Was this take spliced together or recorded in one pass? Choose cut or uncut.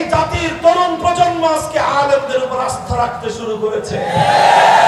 uncut